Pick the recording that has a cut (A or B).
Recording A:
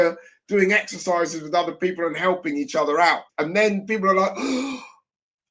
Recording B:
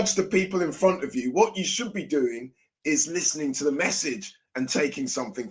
A